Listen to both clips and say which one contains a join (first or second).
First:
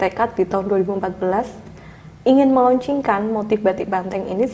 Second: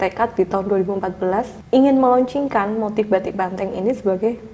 second